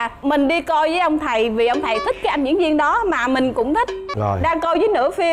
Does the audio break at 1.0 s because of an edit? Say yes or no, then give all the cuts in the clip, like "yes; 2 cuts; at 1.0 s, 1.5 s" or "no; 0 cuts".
no; 1 cut; at 4.2 s